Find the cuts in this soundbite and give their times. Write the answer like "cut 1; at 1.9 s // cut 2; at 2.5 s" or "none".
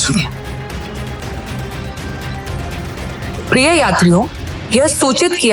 cut 1; at 1.2 s